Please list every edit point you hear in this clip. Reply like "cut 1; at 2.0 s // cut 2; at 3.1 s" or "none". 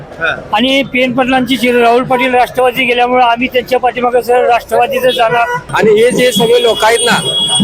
cut 1; at 5.6 s

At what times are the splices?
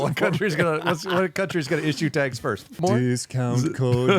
cut 1; at 2.8 s

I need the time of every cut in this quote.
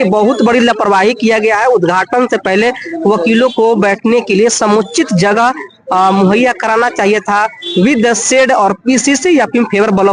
none

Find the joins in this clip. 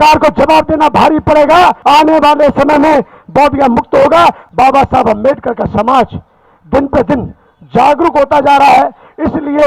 cut 1; at 1.8 s // cut 2; at 4.4 s

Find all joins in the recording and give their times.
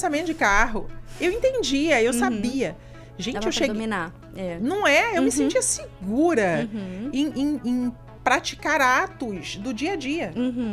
none

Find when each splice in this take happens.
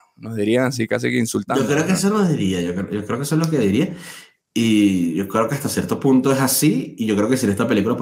none

